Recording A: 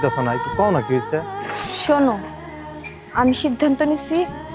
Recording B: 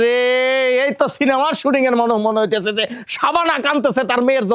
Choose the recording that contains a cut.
A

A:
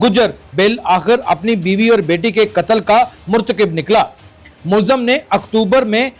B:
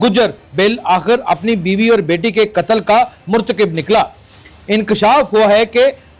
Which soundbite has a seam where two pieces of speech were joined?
A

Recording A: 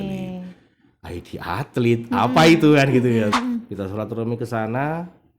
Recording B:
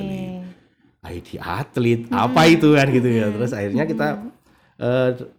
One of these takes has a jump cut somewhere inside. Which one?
A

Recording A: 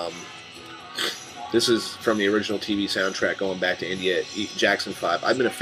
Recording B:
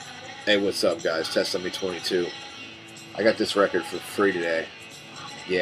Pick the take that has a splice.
A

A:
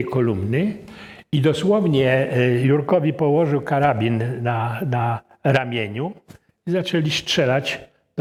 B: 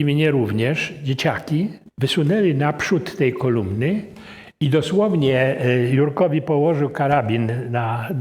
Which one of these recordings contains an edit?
B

